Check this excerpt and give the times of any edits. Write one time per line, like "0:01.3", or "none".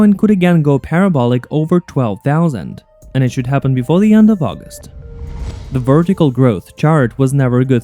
0:05.2